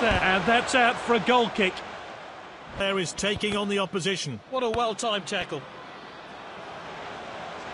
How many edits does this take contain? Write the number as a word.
one